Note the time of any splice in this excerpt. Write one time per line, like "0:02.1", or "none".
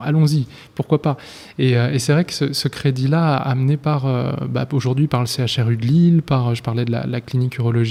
none